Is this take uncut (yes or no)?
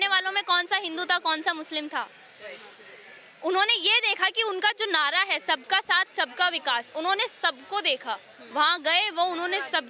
yes